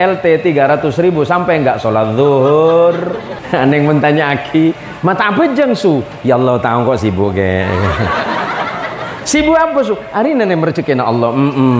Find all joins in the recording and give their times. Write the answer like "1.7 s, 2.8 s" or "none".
3.3 s